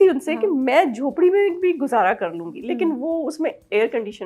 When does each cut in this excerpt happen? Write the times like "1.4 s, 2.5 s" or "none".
none